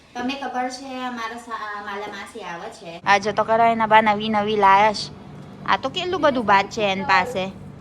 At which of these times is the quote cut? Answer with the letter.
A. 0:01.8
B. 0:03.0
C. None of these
B